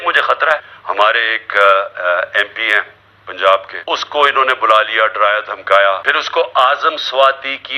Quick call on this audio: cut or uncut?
cut